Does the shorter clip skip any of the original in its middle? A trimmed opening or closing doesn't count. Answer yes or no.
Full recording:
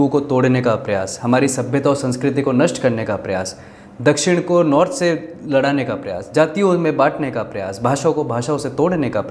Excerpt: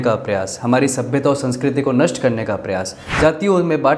yes